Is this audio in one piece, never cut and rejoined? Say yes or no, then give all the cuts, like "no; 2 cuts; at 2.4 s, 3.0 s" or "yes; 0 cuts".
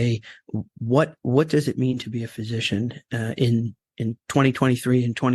no; 2 cuts; at 1.2 s, 4.2 s